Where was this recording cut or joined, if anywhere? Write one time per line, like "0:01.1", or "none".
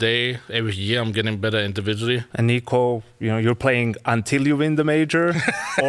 0:02.3